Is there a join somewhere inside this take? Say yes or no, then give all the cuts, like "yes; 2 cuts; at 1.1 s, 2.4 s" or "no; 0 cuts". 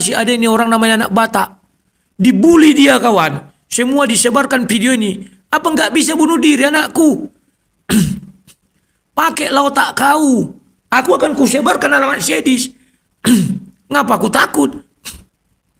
no; 0 cuts